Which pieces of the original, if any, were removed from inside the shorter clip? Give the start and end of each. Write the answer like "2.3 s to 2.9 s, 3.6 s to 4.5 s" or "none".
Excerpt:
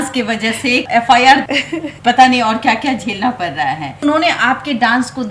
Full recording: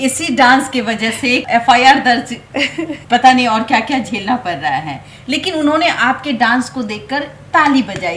2.0 s to 2.5 s, 5.1 s to 5.6 s